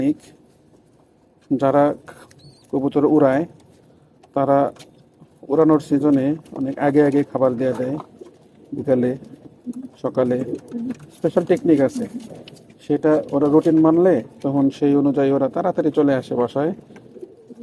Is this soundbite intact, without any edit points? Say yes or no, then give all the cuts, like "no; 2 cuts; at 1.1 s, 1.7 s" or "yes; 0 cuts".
yes; 0 cuts